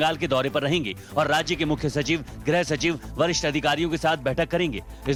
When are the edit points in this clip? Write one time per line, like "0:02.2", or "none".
none